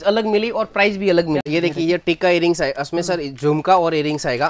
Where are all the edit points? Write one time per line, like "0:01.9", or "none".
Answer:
0:01.4